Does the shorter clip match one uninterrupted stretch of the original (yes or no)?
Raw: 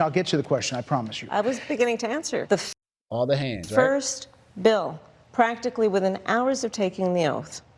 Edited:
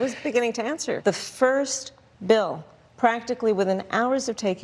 no